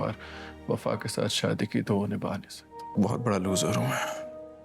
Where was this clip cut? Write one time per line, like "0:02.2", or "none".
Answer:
0:02.8